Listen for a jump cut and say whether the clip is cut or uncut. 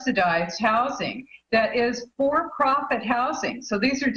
uncut